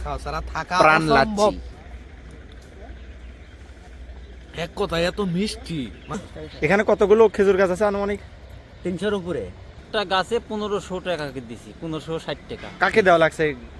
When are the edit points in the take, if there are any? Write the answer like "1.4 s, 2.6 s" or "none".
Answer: 1.8 s, 6.2 s, 9.8 s